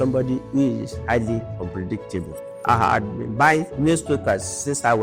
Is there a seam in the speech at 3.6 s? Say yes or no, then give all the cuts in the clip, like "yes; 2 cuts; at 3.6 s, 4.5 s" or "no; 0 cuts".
no; 2 cuts; at 1.5 s, 2.4 s